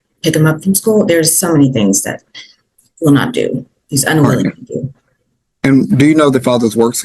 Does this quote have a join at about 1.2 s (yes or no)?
no